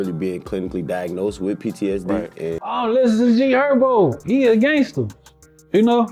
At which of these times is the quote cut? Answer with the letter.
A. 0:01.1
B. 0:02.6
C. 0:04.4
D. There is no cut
B